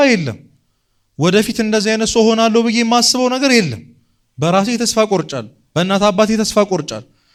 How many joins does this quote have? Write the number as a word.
zero